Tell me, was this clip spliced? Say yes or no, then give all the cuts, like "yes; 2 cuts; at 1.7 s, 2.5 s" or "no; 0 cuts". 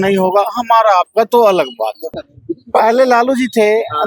yes; 1 cut; at 2.2 s